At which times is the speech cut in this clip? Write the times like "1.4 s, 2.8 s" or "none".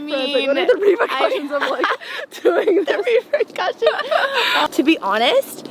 4.6 s